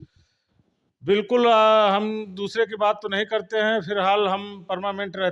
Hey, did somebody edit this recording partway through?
no; 0 cuts

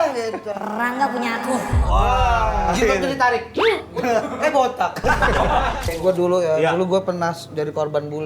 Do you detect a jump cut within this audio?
yes; 1 cut; at 5.8 s

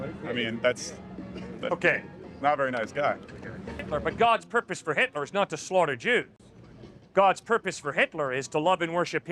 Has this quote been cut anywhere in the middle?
yes; 1 cut; at 3.9 s

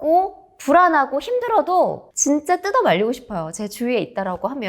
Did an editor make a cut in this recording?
yes; 1 cut; at 2.1 s

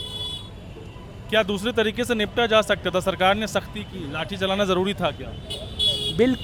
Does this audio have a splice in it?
no; 0 cuts

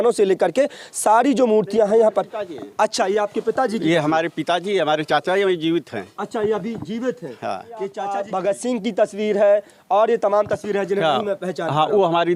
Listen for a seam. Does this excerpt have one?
yes; 1 cut; at 8.0 s

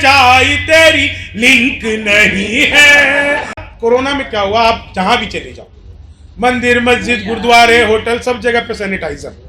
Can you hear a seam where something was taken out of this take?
yes; 1 cut; at 3.6 s

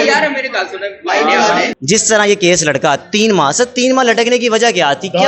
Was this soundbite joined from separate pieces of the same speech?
yes; 1 cut; at 1.7 s

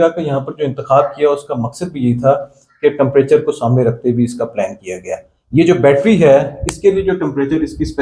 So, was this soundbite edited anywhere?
no; 0 cuts

